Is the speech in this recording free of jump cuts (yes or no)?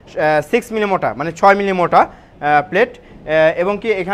yes